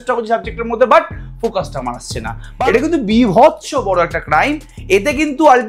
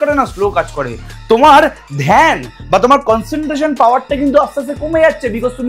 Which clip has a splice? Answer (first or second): first